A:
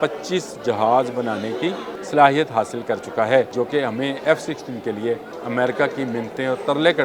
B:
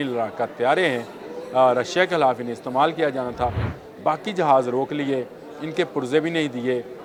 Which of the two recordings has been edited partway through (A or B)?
A